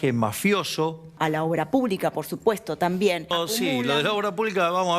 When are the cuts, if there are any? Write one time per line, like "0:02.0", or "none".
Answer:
0:01.1
0:03.3